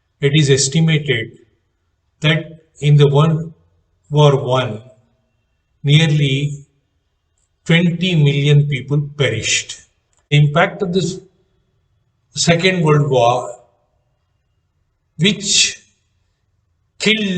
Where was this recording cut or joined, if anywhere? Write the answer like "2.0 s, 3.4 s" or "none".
10.3 s

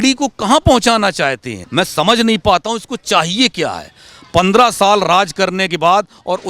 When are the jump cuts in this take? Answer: 1.6 s

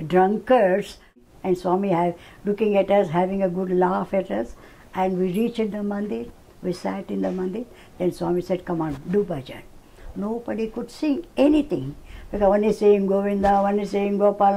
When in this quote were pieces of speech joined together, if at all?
1.1 s

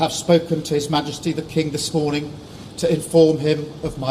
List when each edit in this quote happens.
none

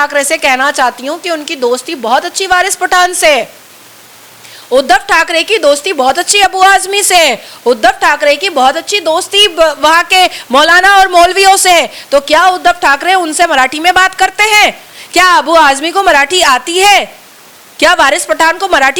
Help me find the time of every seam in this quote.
none

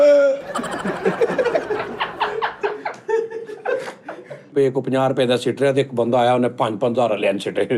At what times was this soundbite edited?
4.5 s

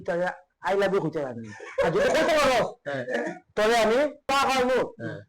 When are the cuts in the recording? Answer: 4.3 s

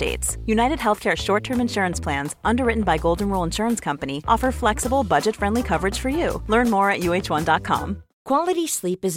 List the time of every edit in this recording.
8.1 s

